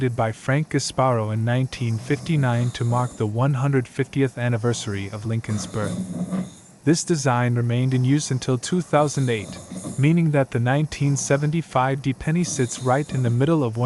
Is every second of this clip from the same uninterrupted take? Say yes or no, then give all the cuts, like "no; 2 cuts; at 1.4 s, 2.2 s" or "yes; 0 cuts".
yes; 0 cuts